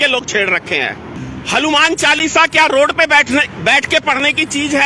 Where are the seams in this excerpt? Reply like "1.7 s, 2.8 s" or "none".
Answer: 1.2 s